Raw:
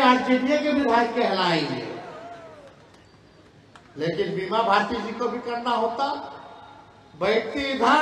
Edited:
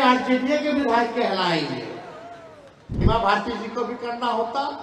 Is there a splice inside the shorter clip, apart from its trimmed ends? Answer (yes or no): yes